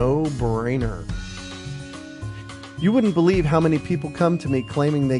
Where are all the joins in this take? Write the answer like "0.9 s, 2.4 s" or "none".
1.0 s, 2.7 s